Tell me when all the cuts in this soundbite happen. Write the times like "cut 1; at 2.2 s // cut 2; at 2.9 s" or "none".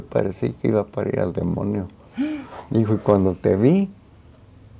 none